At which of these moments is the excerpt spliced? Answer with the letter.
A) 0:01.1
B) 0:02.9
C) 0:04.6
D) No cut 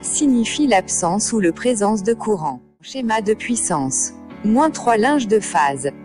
B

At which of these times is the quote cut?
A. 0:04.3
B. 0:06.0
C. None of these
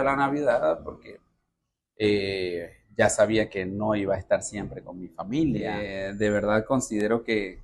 B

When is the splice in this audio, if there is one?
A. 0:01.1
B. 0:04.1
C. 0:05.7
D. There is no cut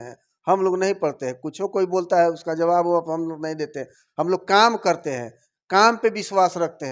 D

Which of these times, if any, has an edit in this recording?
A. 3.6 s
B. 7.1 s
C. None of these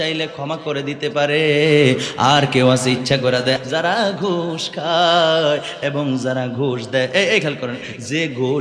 A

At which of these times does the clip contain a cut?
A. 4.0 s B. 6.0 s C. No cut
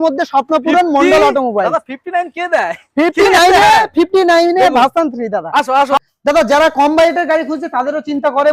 B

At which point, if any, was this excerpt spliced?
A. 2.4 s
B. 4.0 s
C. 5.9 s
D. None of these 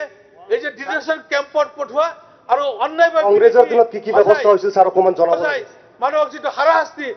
D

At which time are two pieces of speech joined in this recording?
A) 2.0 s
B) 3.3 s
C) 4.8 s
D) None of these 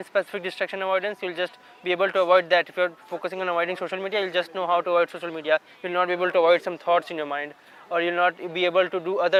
D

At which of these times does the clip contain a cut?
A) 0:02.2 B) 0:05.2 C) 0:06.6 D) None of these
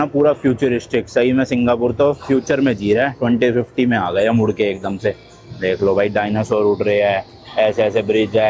D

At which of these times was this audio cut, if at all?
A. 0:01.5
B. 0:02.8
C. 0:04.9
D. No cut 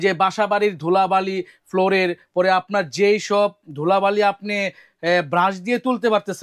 D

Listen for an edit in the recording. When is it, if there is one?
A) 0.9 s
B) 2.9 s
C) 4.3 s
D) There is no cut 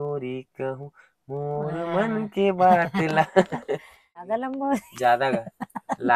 C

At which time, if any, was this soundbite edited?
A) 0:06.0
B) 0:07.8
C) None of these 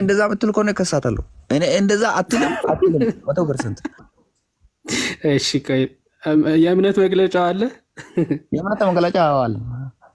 C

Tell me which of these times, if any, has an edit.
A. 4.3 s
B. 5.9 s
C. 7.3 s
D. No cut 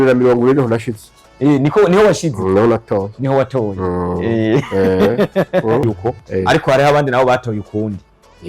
B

